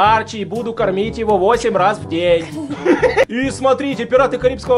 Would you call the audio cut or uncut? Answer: cut